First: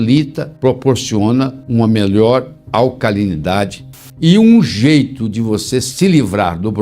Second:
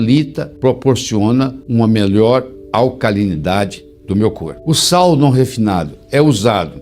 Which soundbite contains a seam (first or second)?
first